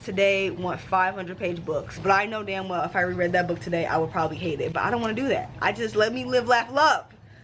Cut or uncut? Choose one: cut